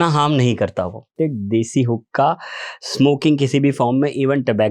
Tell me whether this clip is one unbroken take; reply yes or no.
no